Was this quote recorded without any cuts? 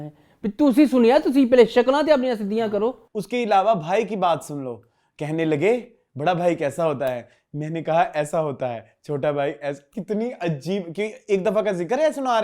no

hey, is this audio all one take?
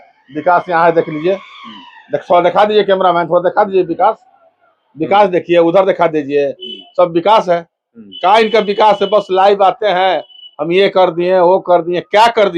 yes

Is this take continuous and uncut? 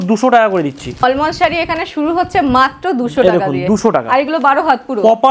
yes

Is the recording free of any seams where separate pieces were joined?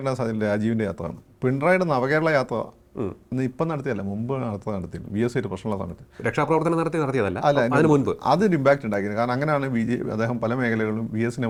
yes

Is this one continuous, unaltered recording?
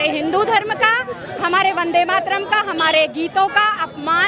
yes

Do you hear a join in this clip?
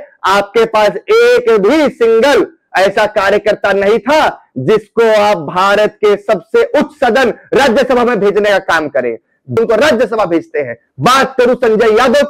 yes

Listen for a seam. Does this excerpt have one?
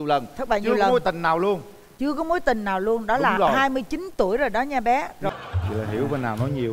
yes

